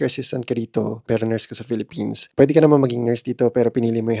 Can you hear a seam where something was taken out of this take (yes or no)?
yes